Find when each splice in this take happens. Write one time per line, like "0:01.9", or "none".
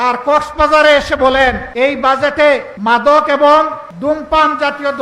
0:01.7
0:02.7
0:03.8